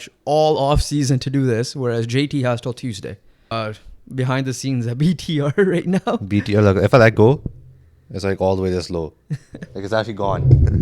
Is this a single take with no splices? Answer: no; 1 cut; at 3.5 s

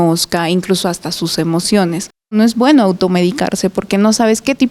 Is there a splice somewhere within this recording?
yes; 1 cut; at 2.3 s

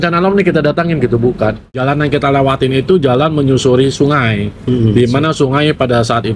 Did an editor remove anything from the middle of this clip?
yes; 1 cut; at 1.8 s

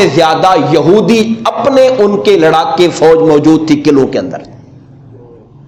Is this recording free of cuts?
yes; 0 cuts

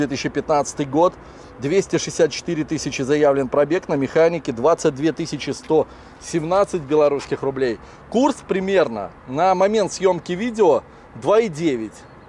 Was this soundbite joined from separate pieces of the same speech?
no; 0 cuts

